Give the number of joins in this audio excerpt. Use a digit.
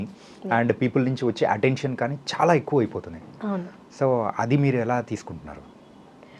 0